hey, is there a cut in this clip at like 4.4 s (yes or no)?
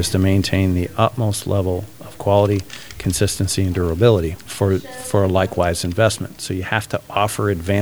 yes